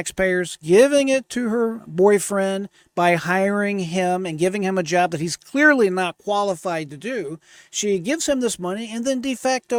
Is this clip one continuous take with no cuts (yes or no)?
yes